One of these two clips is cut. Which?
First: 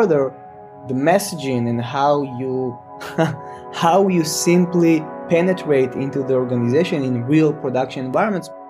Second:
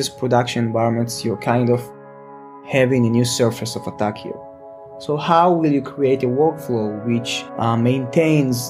second; 2 cuts; at 2.6 s, 7.4 s

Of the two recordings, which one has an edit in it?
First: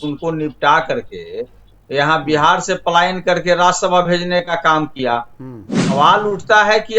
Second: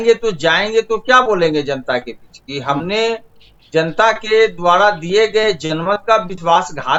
first; 1 cut; at 5.8 s

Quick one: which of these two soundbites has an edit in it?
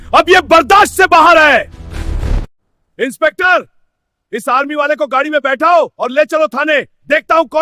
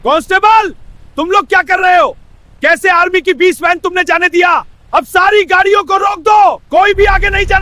first; 1 cut; at 2.4 s

